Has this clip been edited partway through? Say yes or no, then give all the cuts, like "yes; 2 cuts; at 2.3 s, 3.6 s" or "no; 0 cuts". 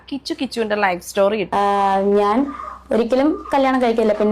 yes; 1 cut; at 1.5 s